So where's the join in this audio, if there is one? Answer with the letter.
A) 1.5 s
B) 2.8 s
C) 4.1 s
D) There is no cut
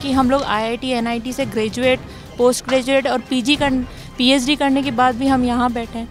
D